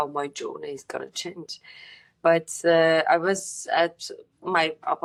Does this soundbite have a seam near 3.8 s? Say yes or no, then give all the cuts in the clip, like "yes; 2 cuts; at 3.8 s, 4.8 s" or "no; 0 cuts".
no; 0 cuts